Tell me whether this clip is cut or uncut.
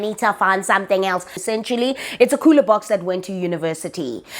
cut